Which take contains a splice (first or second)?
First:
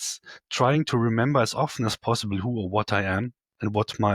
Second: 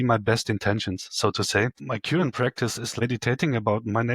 second